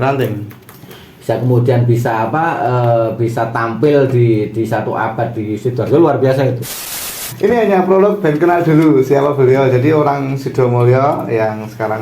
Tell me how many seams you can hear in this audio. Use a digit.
1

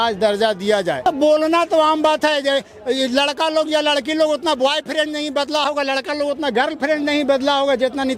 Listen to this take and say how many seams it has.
1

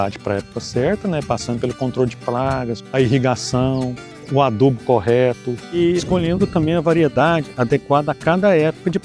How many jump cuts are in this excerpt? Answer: 2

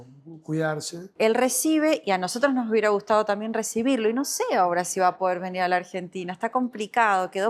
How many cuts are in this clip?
1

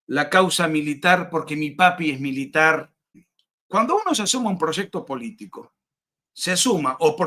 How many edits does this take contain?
1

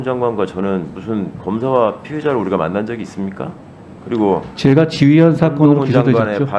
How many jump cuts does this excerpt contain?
0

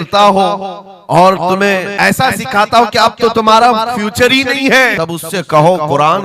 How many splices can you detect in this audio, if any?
2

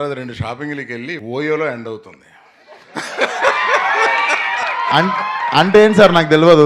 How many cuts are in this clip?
1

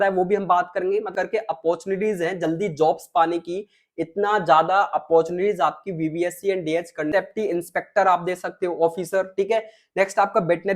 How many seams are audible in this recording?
2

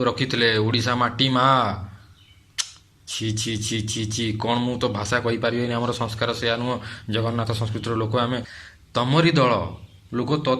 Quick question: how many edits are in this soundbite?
1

